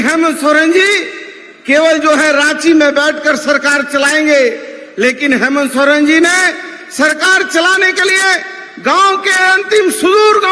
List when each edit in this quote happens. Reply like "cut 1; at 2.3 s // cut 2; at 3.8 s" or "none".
none

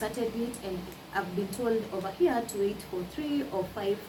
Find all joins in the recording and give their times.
none

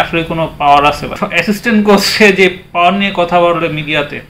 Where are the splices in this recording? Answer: cut 1; at 1.2 s

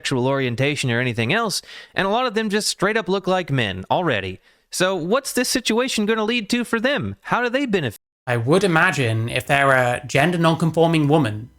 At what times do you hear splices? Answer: none

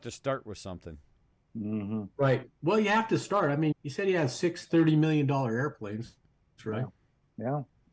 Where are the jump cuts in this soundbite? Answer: cut 1; at 3.7 s

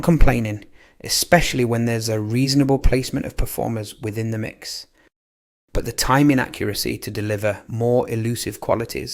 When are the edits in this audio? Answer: cut 1; at 5.2 s

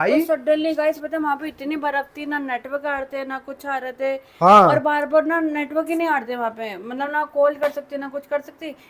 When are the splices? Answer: none

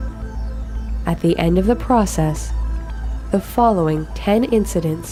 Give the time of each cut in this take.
none

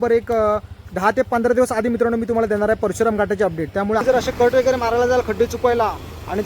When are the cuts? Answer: cut 1; at 0.8 s // cut 2; at 4.0 s

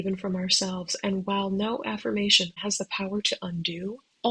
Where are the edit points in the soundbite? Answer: cut 1; at 2.5 s

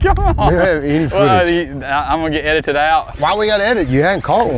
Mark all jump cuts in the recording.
cut 1; at 3.1 s

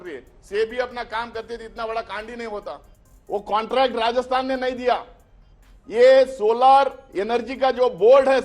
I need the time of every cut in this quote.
cut 1; at 2.8 s

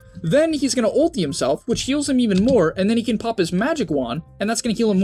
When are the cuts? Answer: none

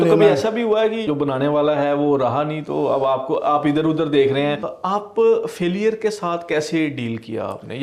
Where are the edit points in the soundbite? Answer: cut 1; at 1.1 s // cut 2; at 4.7 s

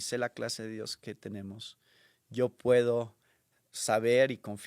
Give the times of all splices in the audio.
none

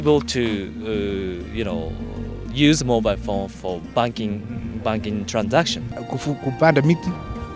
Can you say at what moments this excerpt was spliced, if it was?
cut 1; at 6.0 s

